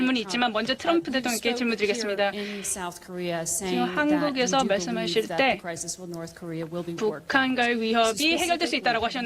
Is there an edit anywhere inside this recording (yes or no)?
no